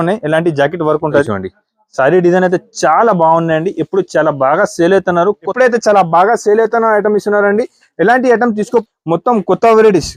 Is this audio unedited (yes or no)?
no